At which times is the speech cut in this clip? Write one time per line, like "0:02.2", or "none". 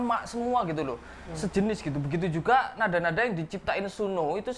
none